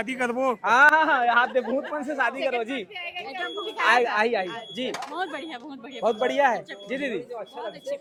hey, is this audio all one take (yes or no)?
yes